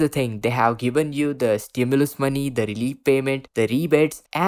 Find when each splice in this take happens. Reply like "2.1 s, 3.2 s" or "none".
none